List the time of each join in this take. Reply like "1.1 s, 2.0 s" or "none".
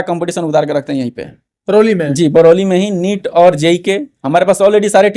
none

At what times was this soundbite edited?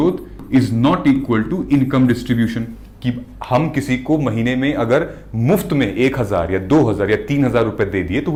none

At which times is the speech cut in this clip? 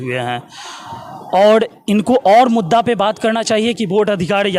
none

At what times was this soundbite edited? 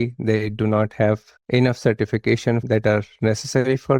1.3 s, 2.6 s

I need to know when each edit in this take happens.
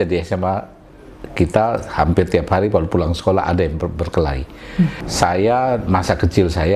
5.0 s

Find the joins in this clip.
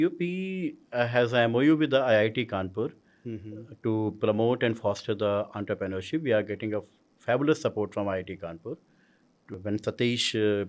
9.5 s

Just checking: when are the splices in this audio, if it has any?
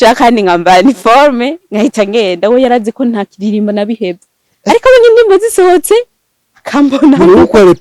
none

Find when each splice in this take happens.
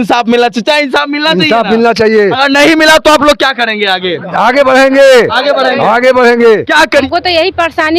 7.1 s

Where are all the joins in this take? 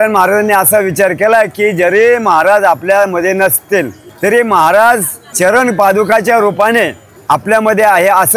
4.0 s, 5.2 s, 7.1 s

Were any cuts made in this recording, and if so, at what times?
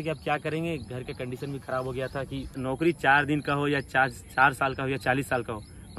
2.6 s

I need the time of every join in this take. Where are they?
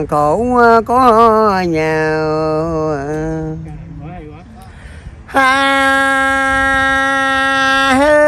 4.5 s

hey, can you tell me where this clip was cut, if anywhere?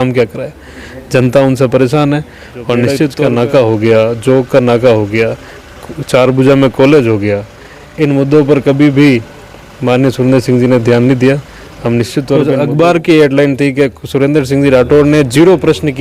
3.1 s, 12.4 s

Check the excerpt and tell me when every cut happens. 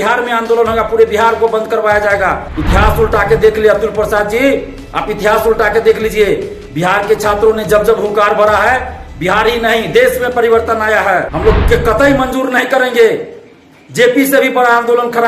2.5 s, 11.3 s

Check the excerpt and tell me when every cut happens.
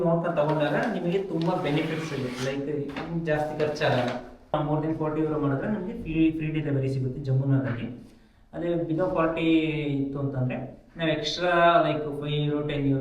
4.5 s

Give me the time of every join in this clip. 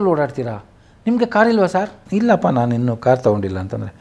2.0 s

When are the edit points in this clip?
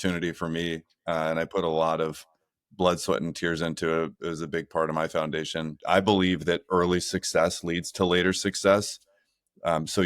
5.8 s

